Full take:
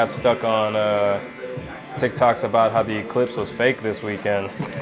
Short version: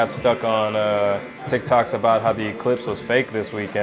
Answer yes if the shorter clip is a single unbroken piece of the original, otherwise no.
no